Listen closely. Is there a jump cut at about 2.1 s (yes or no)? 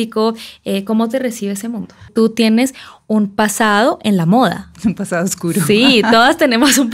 yes